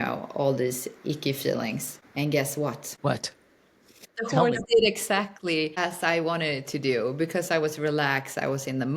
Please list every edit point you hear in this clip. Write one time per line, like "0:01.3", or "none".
0:02.0
0:02.9
0:04.1
0:05.7